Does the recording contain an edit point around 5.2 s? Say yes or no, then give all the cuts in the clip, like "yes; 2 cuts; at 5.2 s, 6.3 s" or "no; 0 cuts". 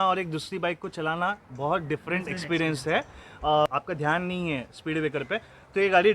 no; 1 cut; at 3.7 s